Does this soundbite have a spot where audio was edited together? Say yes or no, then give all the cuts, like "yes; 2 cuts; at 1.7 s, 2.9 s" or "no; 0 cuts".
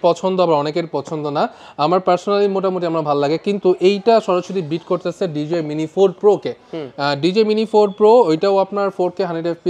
no; 0 cuts